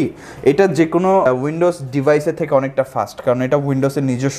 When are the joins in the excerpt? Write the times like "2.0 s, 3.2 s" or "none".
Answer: 1.3 s